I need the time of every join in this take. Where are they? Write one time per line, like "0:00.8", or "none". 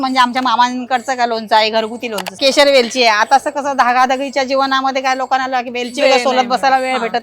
0:02.4